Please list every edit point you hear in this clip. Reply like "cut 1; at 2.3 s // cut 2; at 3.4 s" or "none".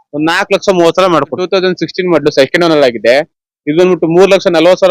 cut 1; at 1.4 s